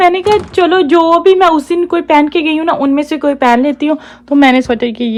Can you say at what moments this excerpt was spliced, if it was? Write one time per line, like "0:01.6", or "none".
none